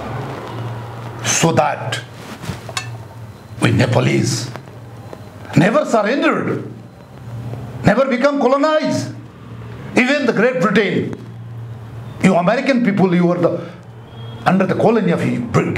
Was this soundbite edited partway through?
no; 0 cuts

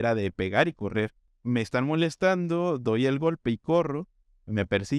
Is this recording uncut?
no; 1 cut; at 1.3 s

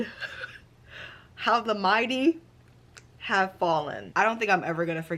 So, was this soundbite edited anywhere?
yes; 1 cut; at 4.0 s

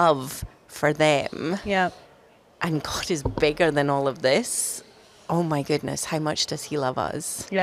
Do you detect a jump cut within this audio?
no; 0 cuts

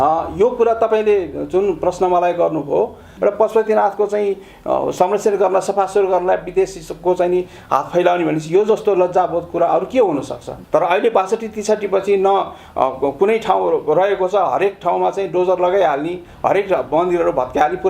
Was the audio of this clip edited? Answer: yes; 2 cuts; at 3.1 s, 10.5 s

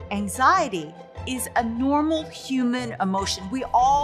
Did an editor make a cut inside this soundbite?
no; 0 cuts

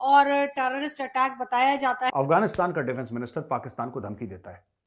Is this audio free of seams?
no; 1 cut; at 2.1 s

